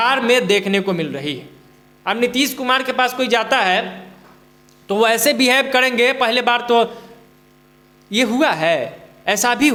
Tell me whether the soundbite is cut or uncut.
uncut